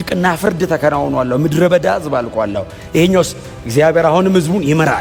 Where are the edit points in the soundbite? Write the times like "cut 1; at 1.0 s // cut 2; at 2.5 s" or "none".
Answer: none